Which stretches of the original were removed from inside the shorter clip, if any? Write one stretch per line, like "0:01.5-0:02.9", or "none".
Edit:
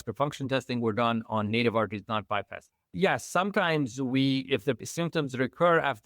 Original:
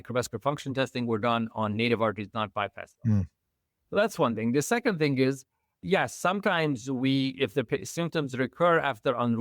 0:02.9-0:05.5
0:07.7-0:07.8